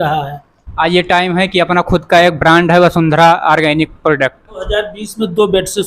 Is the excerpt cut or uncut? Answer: cut